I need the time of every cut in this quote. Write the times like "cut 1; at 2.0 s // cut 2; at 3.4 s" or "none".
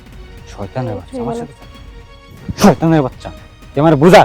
cut 1; at 1.1 s